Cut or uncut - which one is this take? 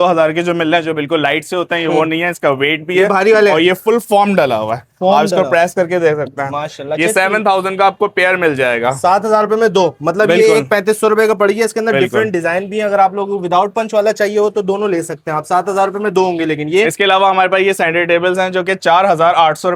uncut